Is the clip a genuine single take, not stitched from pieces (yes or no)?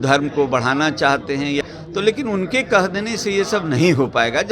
no